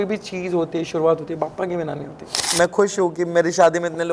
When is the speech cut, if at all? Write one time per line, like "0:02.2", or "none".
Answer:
0:02.4

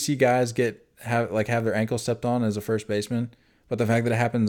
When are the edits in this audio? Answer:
none

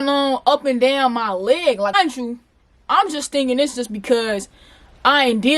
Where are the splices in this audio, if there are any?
0:01.9

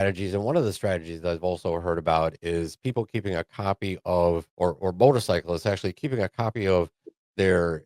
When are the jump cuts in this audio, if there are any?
0:04.5

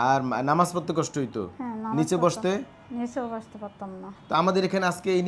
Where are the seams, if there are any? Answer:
0:04.1

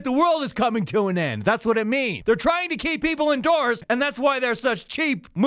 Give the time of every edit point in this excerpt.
0:02.1
0:03.8

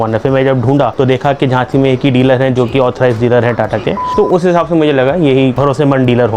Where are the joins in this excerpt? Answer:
0:00.9
0:04.0
0:05.6

